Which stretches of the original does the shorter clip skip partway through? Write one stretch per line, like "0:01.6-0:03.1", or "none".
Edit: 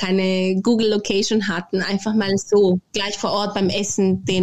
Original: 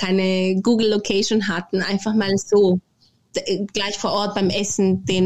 0:03.0-0:03.8